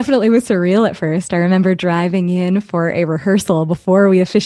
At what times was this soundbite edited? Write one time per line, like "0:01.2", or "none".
none